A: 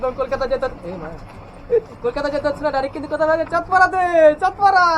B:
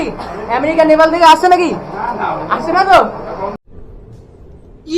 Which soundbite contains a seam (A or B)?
B